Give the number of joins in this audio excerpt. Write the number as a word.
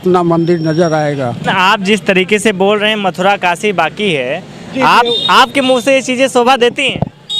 one